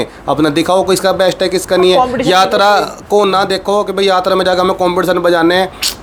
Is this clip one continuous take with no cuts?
yes; 0 cuts

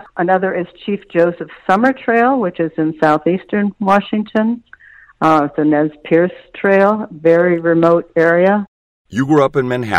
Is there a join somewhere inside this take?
yes; 1 cut; at 8.7 s

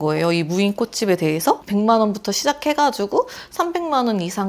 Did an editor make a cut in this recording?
yes; 1 cut; at 1.6 s

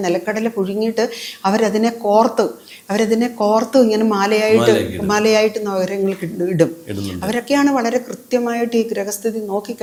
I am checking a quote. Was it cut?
no; 0 cuts

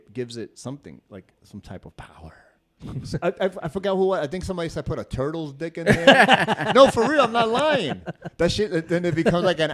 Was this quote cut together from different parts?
yes; 1 cut; at 2.7 s

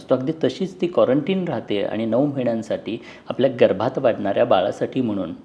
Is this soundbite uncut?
yes; 0 cuts

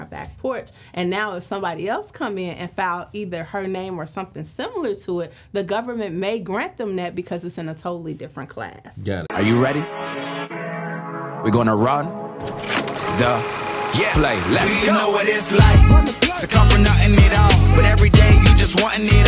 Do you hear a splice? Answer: yes; 1 cut; at 9.2 s

